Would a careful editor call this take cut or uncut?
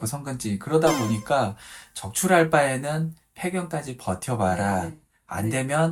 uncut